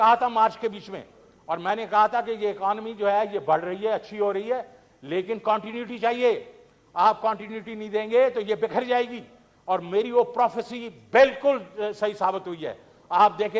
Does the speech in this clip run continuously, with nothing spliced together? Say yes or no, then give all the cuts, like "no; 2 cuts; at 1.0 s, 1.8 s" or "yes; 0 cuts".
yes; 0 cuts